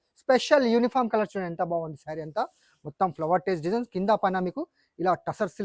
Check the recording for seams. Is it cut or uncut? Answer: uncut